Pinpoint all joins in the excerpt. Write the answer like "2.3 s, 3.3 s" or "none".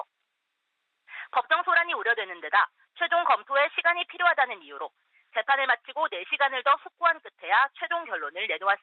none